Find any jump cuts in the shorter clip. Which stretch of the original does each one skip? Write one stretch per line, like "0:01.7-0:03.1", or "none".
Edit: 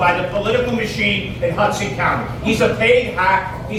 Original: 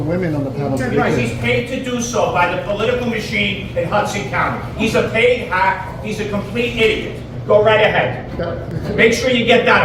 none